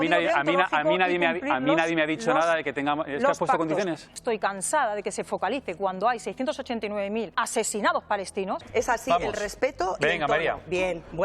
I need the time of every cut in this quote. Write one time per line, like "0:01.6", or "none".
0:04.1
0:07.3
0:08.6